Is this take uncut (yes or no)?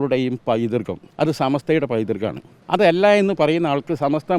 no